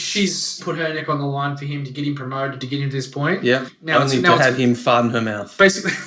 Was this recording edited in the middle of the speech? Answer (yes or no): yes